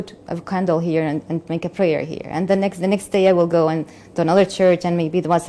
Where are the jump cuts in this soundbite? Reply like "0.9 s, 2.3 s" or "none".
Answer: none